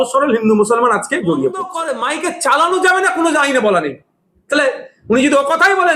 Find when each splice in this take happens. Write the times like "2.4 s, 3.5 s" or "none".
1.8 s